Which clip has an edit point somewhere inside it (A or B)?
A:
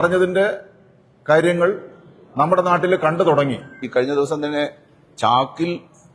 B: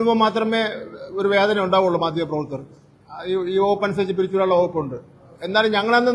A